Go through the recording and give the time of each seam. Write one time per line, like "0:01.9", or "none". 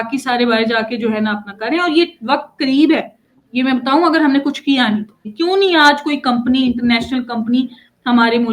0:05.3